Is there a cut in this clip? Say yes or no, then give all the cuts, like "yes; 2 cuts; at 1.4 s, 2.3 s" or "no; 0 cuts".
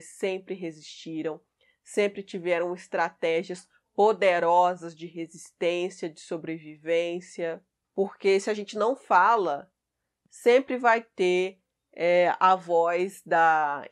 yes; 1 cut; at 7.7 s